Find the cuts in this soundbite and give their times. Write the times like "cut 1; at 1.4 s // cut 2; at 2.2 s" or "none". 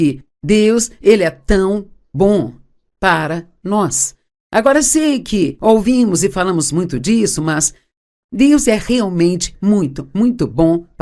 cut 1; at 8.8 s